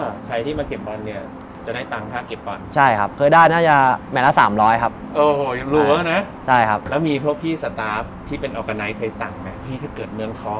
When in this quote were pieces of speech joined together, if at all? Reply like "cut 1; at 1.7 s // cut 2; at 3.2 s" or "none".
cut 1; at 3.1 s // cut 2; at 6.8 s

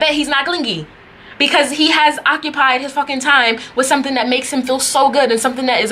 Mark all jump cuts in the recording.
none

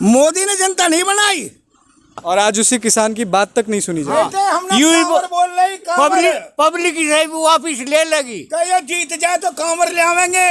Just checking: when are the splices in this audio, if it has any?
cut 1; at 2.2 s

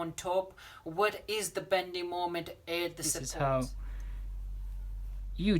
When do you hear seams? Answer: cut 1; at 3.2 s

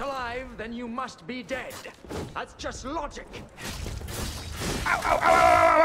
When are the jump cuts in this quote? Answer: cut 1; at 3.7 s

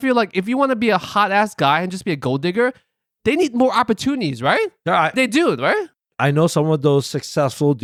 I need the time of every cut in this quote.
none

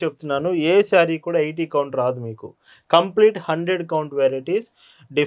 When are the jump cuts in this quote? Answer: none

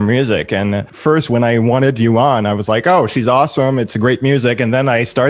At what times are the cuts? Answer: cut 1; at 0.9 s

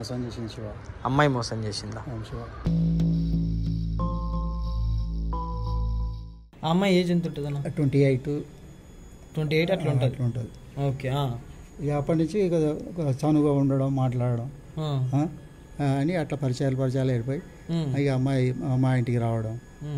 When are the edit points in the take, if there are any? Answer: cut 1; at 6.5 s

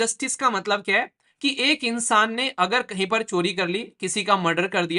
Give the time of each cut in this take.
none

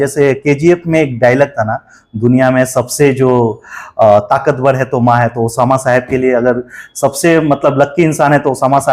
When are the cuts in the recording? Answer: none

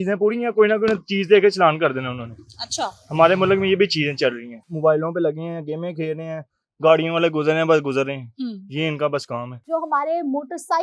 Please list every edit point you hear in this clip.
cut 1; at 4.7 s // cut 2; at 9.5 s

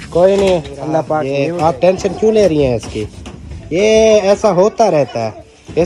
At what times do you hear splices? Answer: cut 1; at 1.3 s

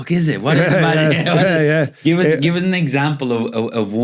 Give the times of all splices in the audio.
none

